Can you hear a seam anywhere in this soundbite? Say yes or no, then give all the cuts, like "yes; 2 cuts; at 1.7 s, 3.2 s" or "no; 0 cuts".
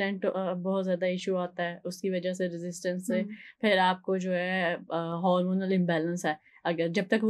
no; 0 cuts